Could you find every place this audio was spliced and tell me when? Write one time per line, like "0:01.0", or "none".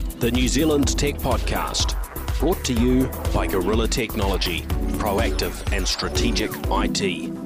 none